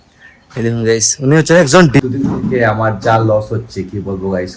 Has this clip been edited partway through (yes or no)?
yes